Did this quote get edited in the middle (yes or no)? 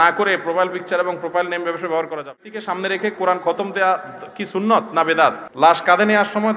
yes